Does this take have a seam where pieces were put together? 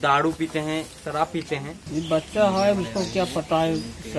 yes; 1 cut; at 1.8 s

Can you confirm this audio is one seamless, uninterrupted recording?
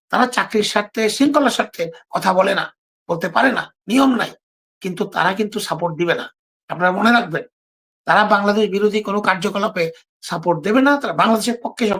yes; 0 cuts

